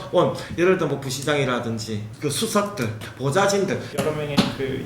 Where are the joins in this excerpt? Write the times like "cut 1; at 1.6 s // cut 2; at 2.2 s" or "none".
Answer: cut 1; at 3.0 s // cut 2; at 3.9 s